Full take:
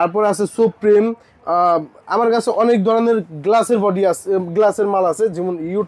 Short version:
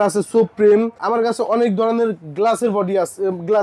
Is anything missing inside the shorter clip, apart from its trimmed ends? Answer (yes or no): yes